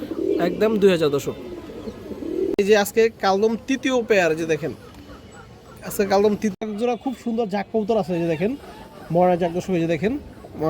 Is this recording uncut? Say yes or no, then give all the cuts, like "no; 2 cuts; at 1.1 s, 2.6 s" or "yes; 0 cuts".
no; 2 cuts; at 2.5 s, 6.5 s